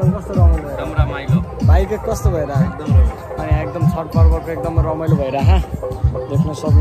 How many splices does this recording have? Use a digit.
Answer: 0